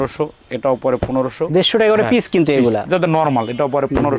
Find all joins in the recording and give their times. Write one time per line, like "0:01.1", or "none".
none